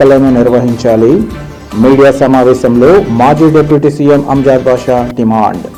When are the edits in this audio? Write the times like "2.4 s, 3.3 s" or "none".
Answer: none